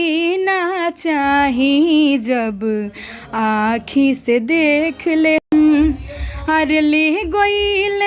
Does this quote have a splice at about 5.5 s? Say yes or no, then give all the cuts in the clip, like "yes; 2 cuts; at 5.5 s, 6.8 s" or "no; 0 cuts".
yes; 1 cut; at 5.5 s